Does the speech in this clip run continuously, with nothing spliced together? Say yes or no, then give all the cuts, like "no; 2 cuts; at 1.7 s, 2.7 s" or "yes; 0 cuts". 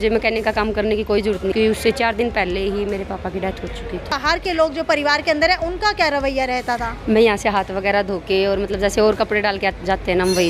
no; 2 cuts; at 1.5 s, 4.1 s